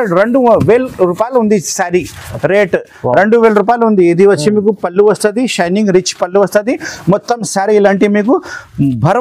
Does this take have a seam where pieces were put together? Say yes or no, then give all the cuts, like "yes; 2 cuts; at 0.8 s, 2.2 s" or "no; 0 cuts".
no; 0 cuts